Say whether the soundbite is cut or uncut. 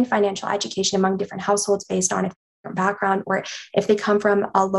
cut